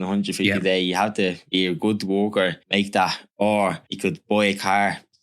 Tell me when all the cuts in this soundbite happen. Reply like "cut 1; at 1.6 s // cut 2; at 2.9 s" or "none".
cut 1; at 1.4 s // cut 2; at 2.6 s // cut 3; at 3.9 s